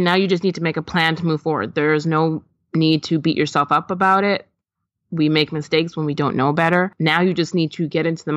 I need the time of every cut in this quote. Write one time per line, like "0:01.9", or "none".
0:06.9